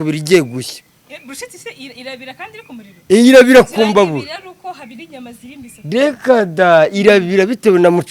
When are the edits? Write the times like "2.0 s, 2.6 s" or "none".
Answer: none